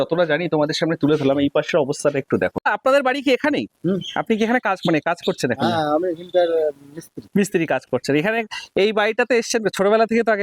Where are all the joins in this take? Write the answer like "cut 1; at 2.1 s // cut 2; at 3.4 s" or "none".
cut 1; at 2.6 s

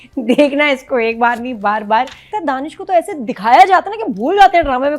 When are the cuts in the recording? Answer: cut 1; at 2.3 s

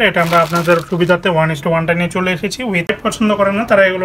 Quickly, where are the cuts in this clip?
cut 1; at 2.9 s

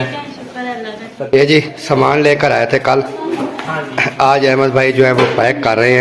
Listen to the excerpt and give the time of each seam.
cut 1; at 1.4 s

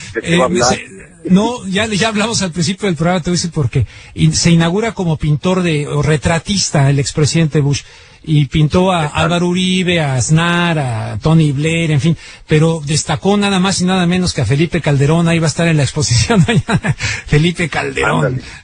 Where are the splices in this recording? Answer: cut 1; at 9.1 s

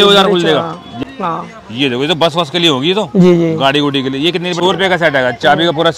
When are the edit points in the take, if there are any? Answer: cut 1; at 1.0 s // cut 2; at 4.6 s

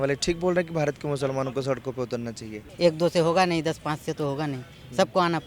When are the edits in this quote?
cut 1; at 2.6 s

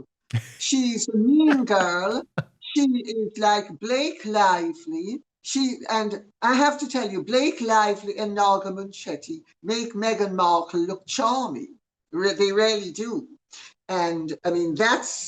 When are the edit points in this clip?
none

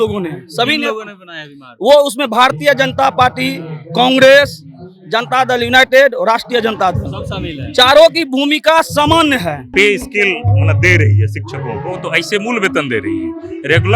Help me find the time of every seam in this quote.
cut 1; at 9.6 s

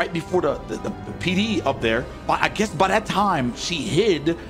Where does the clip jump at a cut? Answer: none

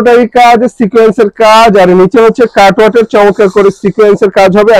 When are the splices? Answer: none

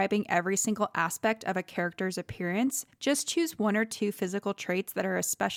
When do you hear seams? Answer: none

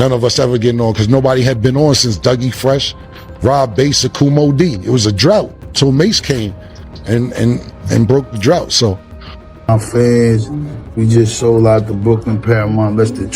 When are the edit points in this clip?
cut 1; at 9.4 s

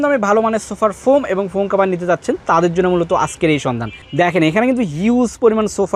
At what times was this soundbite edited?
none

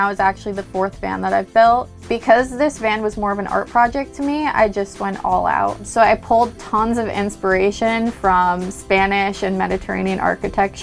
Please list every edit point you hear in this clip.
cut 1; at 1.9 s // cut 2; at 5.8 s

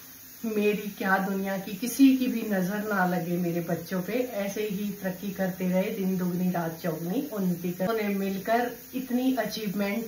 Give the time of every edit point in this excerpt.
cut 1; at 7.9 s

